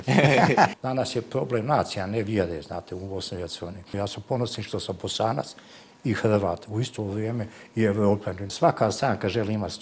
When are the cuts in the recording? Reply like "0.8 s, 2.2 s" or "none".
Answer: 0.7 s, 3.9 s, 8.4 s